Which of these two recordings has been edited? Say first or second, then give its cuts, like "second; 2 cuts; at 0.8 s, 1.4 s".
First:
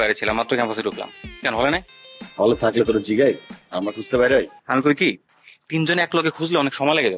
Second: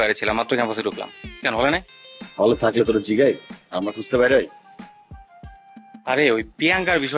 first; 1 cut; at 4.6 s